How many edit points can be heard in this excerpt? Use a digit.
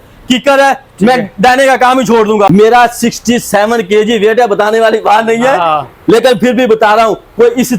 1